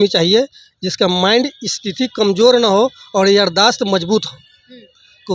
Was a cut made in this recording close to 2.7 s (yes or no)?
no